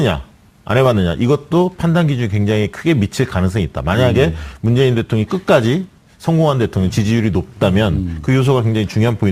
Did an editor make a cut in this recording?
no; 0 cuts

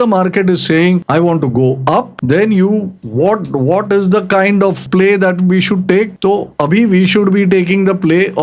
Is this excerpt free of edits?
no; 5 cuts; at 1.0 s, 2.1 s, 3.0 s, 4.8 s, 6.1 s

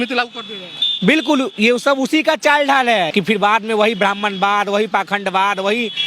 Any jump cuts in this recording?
yes; 1 cut; at 3.1 s

